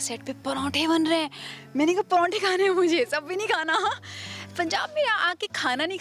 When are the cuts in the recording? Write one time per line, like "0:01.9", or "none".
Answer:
none